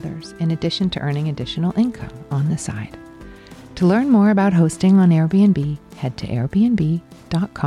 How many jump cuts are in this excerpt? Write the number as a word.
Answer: zero